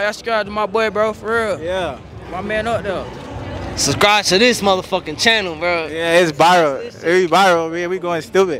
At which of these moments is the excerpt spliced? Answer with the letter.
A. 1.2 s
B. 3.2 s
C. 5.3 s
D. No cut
D